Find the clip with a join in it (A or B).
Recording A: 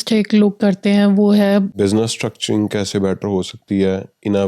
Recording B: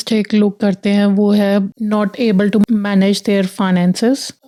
A